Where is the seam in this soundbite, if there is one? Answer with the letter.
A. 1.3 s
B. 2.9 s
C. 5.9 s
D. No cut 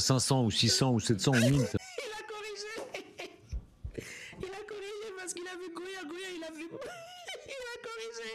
D